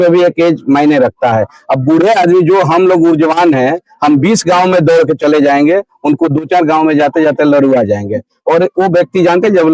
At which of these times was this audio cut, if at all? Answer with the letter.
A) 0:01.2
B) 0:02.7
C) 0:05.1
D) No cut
D